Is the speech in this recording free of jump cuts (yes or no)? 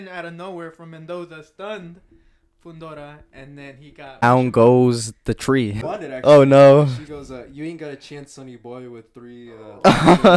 no